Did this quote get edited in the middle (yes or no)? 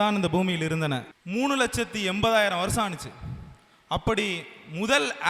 yes